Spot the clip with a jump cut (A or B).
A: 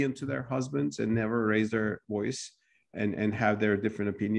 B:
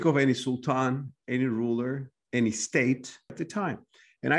B